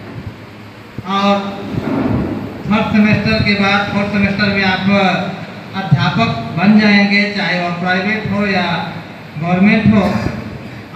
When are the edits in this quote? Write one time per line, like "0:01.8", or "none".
none